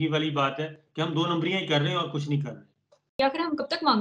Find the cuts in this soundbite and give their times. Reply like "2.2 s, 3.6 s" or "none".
3.1 s